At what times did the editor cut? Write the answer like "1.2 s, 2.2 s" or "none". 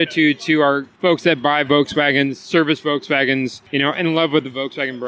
0.9 s, 3.6 s